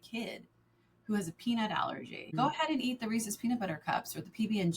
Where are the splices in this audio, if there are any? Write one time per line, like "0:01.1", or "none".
0:02.3

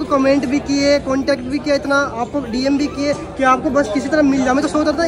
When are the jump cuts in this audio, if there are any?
none

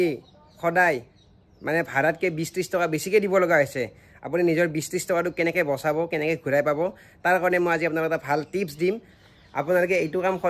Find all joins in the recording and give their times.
0:09.1

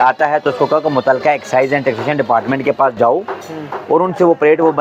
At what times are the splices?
none

